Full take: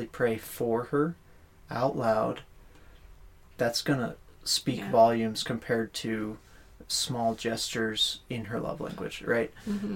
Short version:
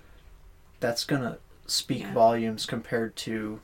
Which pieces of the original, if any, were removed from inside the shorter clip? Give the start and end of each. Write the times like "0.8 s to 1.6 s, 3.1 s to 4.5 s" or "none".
none

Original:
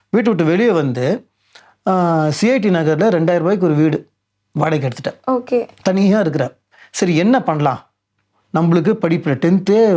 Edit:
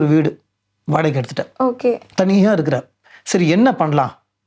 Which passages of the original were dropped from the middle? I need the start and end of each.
none

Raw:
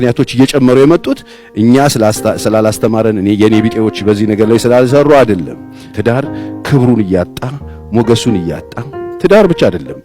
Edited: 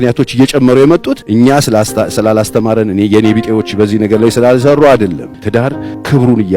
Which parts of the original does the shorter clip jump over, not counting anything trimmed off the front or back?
1.2 s to 1.4 s, 6.0 s to 6.3 s

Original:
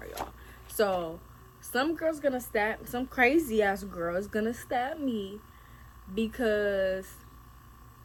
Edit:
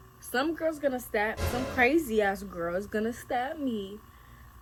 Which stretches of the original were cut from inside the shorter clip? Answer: none

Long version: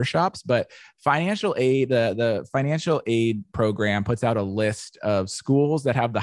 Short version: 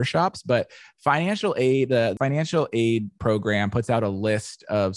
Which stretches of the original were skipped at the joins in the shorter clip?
2.1 s to 2.5 s

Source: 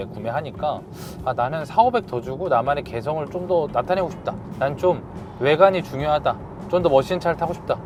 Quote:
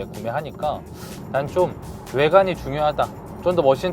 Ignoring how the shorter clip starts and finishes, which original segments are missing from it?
1.2 s to 4.4 s

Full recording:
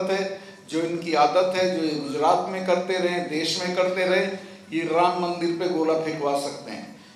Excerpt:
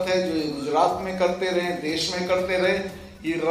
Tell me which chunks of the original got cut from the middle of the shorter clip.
none

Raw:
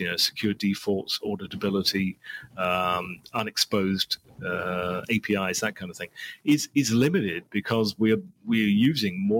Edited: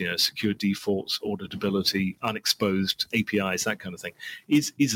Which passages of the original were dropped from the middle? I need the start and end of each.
2.2 s to 3.3 s, 4.2 s to 5.0 s

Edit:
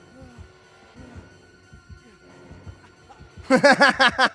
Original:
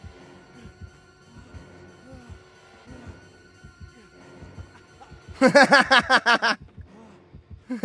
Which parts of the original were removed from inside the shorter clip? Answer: none

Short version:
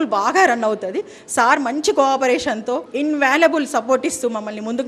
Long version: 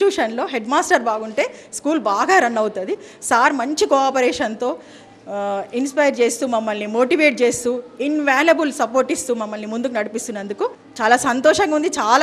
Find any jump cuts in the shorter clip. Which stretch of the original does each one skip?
4.8 s to 7.9 s

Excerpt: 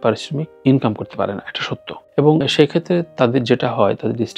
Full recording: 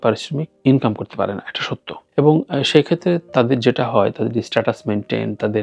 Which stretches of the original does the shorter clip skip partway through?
2.5 s to 2.6 s

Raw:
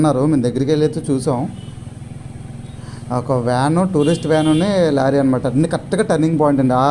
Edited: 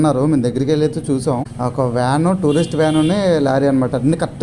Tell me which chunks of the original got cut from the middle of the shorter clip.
1.5 s to 3.0 s

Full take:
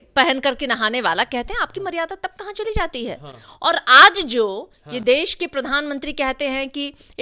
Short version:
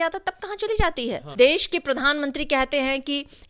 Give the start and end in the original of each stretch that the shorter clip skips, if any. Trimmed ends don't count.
3.2 s to 4.9 s

